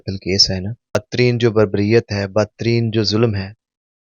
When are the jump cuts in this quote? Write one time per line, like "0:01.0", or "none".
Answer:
0:01.0

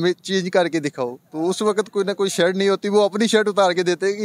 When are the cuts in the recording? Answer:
none

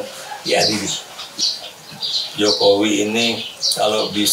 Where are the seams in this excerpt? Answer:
0:01.3

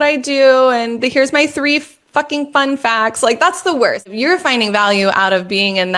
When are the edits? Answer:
0:04.1

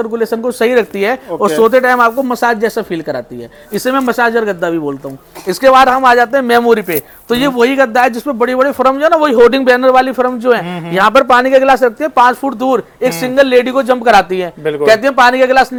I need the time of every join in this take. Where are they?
none

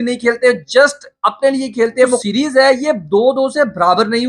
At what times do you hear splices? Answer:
0:02.2

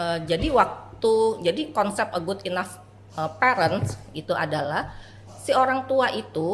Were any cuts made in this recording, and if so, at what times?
none

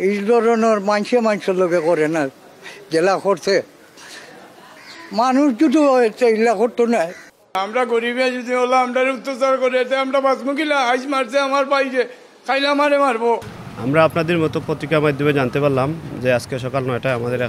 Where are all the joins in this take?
none

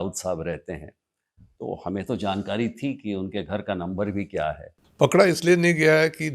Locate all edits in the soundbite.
0:04.8

